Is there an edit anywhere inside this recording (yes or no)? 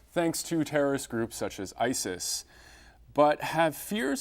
yes